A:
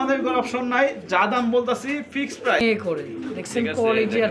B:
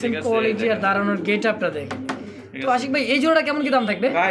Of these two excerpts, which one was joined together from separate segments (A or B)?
A